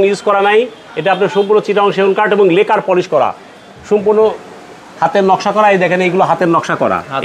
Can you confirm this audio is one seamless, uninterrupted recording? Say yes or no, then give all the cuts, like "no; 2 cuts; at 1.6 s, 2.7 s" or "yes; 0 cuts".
yes; 0 cuts